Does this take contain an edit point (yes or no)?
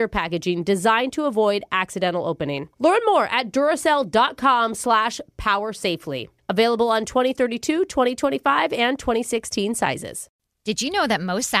yes